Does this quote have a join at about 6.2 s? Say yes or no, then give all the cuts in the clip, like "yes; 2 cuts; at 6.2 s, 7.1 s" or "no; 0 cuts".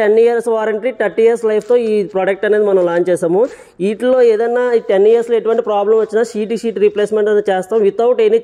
no; 0 cuts